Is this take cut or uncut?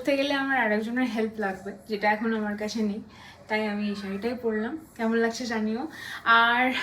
uncut